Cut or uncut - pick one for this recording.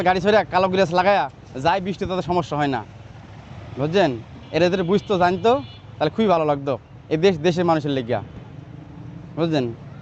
uncut